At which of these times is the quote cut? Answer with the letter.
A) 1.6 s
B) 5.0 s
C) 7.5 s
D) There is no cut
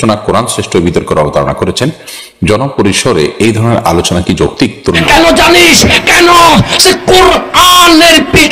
B